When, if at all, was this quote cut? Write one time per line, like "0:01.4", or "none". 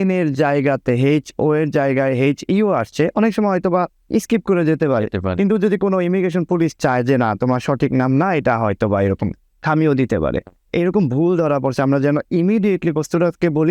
0:10.5